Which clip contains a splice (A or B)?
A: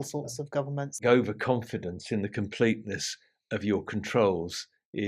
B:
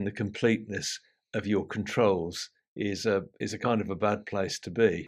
A